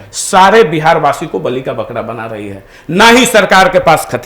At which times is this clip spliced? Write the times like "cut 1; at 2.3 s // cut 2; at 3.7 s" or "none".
none